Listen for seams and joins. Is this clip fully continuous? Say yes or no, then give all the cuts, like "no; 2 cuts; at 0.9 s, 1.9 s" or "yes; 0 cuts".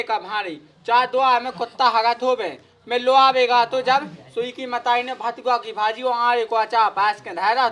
yes; 0 cuts